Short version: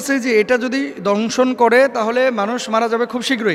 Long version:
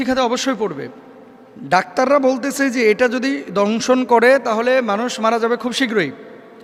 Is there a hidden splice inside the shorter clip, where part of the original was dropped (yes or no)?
no